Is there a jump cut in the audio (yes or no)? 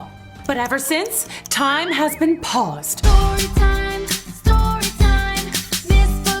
yes